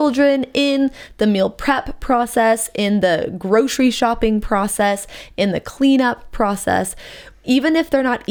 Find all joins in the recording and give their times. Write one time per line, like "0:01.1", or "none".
none